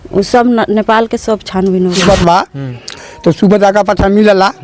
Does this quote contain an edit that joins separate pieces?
yes; 1 cut; at 2.0 s

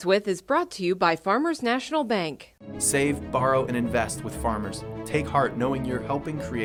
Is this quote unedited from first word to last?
yes; 0 cuts

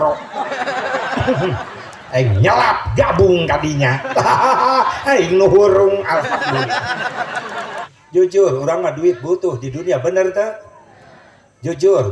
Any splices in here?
yes; 1 cut; at 7.9 s

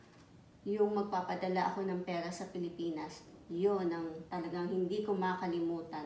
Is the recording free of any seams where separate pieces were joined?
yes; 0 cuts

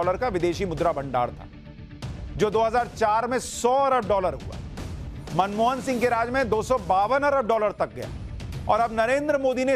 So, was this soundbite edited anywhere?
no; 0 cuts

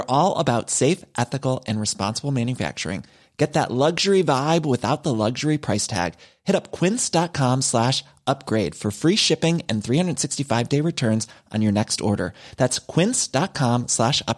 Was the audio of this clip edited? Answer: no; 0 cuts

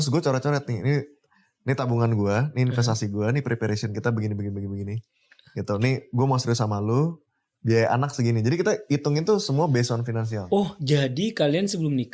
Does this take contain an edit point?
no; 0 cuts

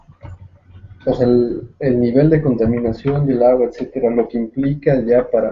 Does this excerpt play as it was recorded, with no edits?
no; 1 cut; at 3.8 s

